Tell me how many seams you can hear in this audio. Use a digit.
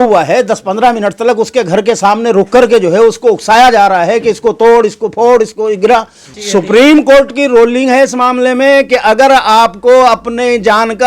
1